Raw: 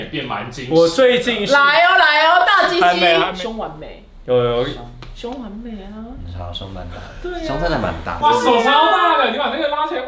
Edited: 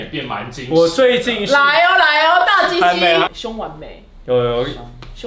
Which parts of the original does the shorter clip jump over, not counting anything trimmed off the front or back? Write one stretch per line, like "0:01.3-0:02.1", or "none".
none

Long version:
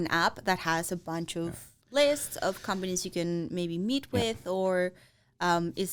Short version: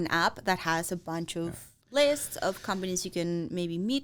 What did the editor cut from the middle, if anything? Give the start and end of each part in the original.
none

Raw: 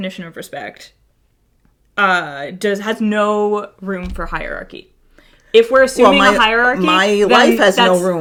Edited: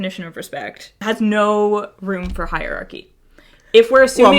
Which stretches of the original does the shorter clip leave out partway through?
0:01.0-0:02.8

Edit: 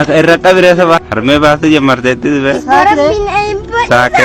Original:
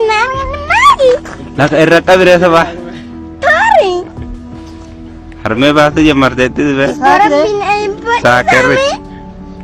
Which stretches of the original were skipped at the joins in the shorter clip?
0:02.7-0:05.4

